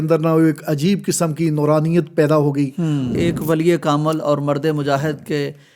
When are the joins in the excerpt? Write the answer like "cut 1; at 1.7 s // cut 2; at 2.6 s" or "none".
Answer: cut 1; at 3.1 s